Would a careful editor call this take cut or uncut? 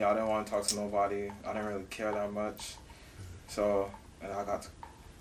uncut